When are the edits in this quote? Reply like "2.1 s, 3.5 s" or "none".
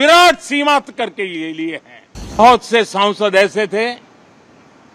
2.4 s

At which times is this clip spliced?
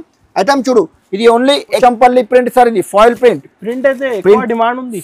1.8 s

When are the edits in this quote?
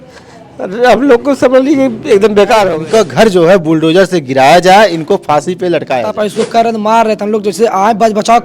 2.7 s, 6.1 s

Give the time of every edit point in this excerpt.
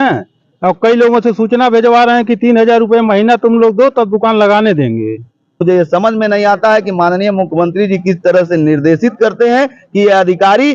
5.6 s

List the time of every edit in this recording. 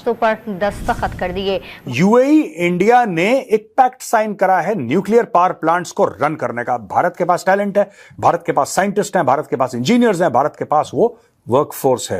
1.7 s

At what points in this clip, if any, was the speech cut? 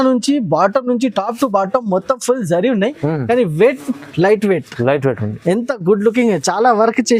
none

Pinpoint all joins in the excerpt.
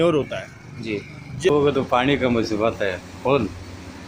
1.5 s

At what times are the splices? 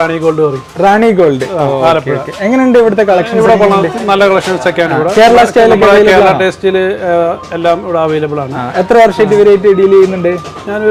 none

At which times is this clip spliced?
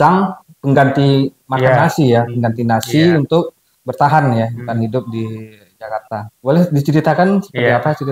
6.3 s

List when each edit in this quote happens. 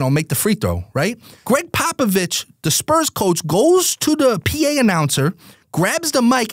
1.3 s

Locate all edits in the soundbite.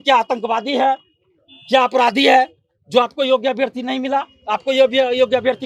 none

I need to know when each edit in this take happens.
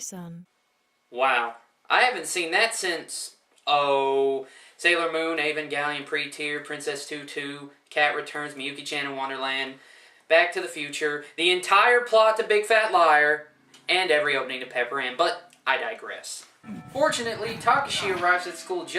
12.9 s

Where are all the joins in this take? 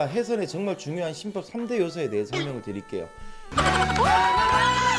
none

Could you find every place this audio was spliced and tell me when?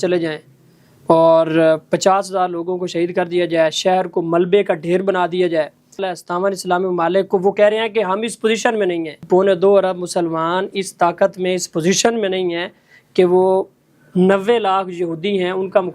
6.1 s, 9.1 s

